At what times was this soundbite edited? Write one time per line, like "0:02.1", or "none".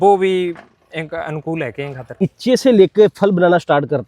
0:02.2